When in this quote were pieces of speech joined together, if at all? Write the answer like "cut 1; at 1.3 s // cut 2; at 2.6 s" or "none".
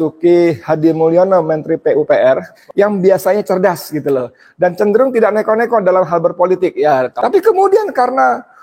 cut 1; at 2.5 s // cut 2; at 7.1 s

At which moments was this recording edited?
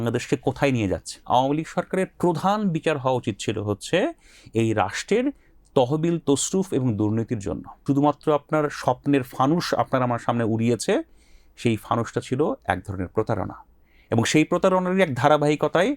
cut 1; at 1.2 s // cut 2; at 7.8 s

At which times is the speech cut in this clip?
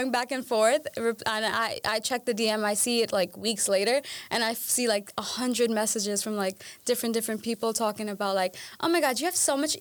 none

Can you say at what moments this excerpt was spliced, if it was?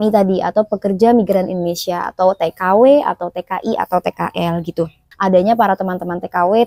cut 1; at 5.0 s

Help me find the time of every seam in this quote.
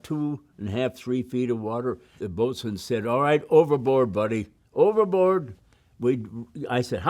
cut 1; at 2.2 s

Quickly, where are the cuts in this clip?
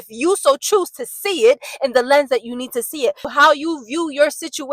cut 1; at 3.2 s

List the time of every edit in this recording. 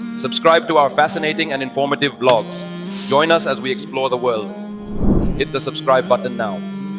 none

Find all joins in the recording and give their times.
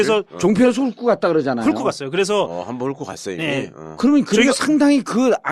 cut 1; at 4.6 s

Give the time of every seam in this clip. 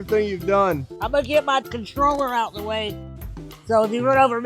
cut 1; at 1.0 s

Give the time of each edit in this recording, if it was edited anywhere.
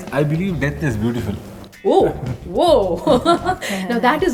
none

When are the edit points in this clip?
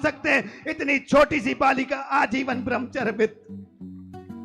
cut 1; at 3.4 s

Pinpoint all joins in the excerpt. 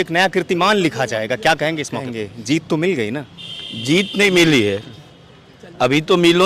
cut 1; at 2.2 s

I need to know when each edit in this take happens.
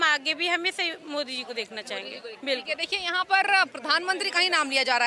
none

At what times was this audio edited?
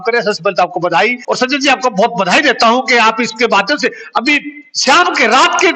cut 1; at 1.2 s

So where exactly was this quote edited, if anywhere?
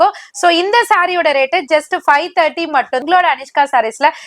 cut 1; at 3.0 s

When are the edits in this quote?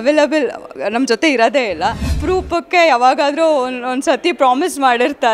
cut 1; at 2.1 s

